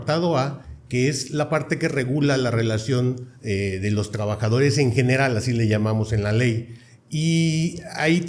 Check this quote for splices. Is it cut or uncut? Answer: uncut